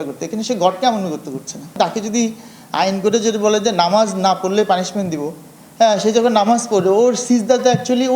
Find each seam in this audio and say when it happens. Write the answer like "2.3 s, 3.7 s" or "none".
1.8 s

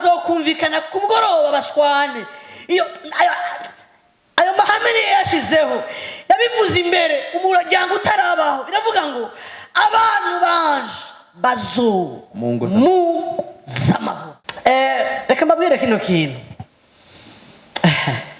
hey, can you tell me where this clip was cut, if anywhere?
14.4 s

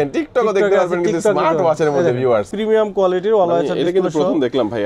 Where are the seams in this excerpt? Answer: 2.5 s

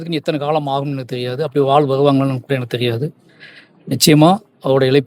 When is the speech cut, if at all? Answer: none

